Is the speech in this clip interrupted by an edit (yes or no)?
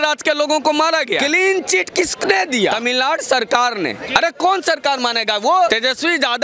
yes